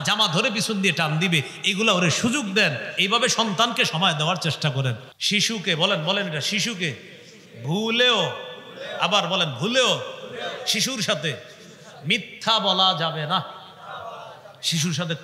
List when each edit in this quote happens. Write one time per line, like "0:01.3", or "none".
0:05.0